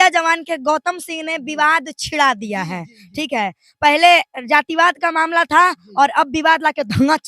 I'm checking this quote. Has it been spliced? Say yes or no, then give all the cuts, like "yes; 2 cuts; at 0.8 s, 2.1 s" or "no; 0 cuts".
no; 0 cuts